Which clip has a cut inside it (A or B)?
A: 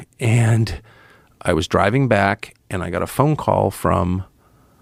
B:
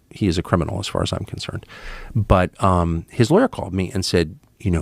B